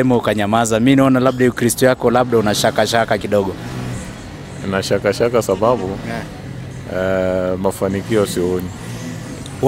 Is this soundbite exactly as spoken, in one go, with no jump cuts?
yes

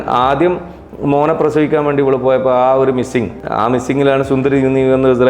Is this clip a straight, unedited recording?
no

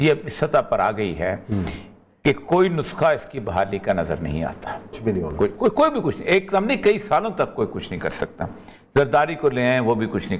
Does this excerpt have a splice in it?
no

